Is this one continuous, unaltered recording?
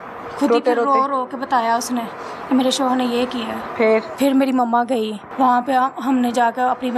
no; 2 cuts; at 4.1 s, 5.2 s

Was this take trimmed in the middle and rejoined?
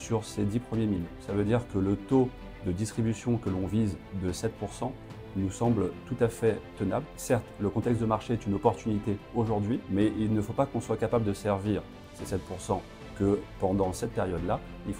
yes; 4 cuts; at 1.2 s, 7.1 s, 9.8 s, 13.0 s

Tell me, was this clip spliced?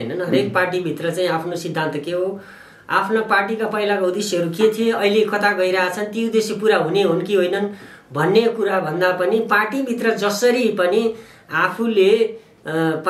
no; 0 cuts

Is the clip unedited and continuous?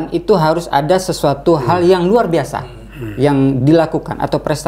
yes; 0 cuts

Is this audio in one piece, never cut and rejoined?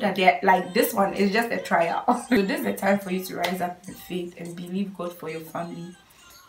no; 1 cut; at 2.4 s

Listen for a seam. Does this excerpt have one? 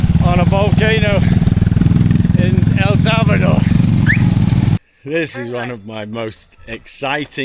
yes; 1 cut; at 4.8 s

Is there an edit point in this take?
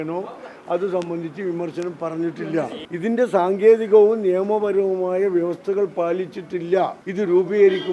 yes; 2 cuts; at 2.8 s, 7.0 s

